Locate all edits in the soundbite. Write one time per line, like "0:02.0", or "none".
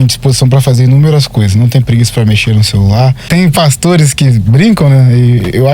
0:03.2